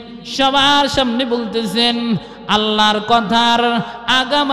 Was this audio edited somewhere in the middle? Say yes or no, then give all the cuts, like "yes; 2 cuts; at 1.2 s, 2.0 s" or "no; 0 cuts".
no; 0 cuts